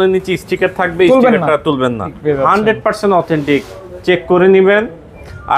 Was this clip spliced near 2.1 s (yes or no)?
yes